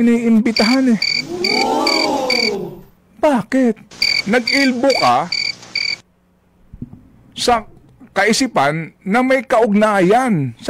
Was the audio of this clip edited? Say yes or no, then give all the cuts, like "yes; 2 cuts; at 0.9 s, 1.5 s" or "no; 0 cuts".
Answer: no; 0 cuts